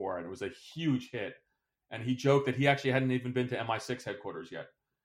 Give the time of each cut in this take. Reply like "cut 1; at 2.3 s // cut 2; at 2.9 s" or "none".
none